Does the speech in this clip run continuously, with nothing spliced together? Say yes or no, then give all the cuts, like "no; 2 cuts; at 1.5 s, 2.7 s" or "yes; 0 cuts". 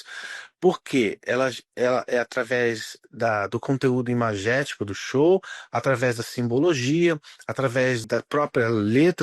no; 1 cut; at 8.0 s